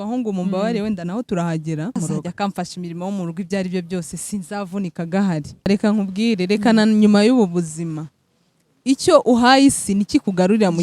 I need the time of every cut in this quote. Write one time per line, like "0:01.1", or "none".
0:02.0
0:05.7